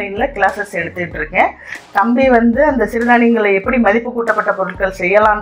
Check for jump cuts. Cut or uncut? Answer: uncut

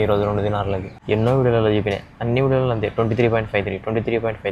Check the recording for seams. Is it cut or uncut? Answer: cut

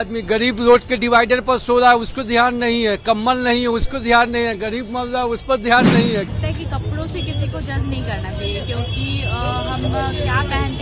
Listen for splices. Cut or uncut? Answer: cut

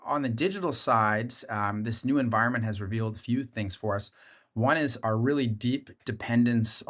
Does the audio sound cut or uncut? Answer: cut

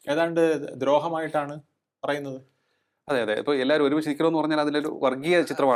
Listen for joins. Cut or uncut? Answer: uncut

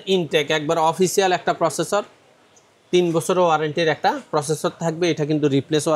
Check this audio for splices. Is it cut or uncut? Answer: uncut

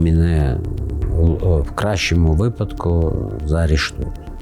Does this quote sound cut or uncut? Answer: cut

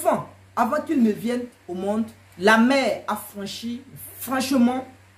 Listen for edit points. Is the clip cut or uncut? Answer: cut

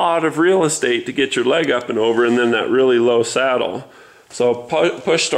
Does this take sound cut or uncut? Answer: uncut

